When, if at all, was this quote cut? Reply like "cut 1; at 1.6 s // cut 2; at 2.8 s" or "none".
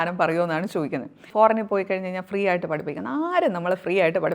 cut 1; at 1.2 s

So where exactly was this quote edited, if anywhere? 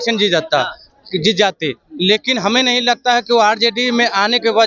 none

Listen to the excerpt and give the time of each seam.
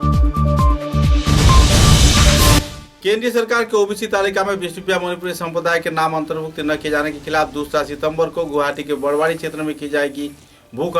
cut 1; at 2.7 s

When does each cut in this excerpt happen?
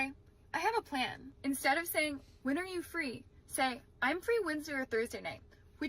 cut 1; at 1.3 s

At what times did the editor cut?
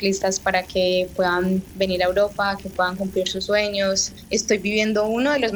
cut 1; at 4.1 s

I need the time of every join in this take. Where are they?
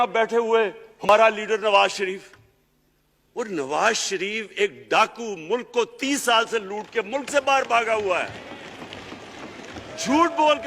cut 1; at 1.1 s

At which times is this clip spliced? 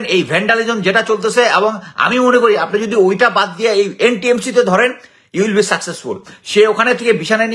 none

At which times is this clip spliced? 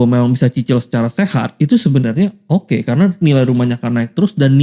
cut 1; at 1.5 s

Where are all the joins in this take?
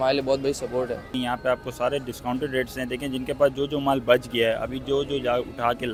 none

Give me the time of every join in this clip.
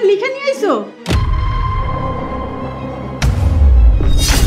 none

